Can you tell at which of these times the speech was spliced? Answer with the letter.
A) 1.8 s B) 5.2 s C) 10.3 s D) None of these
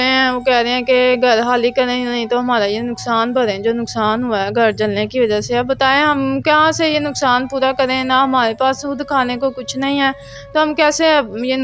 D